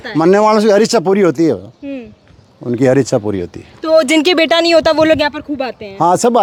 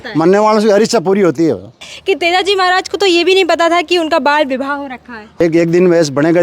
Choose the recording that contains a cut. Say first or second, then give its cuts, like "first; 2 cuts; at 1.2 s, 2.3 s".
second; 2 cuts; at 1.9 s, 5.4 s